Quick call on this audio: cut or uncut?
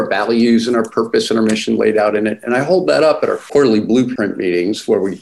cut